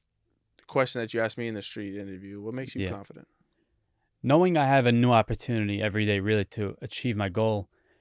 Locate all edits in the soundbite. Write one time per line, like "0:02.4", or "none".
none